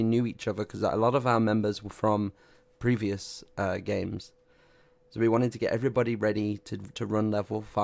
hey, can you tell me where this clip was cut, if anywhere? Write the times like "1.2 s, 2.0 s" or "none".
none